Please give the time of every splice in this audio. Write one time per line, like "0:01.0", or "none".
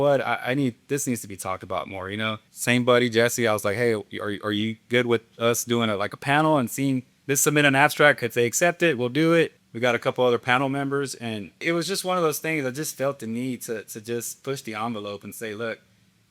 0:02.5
0:09.6
0:11.6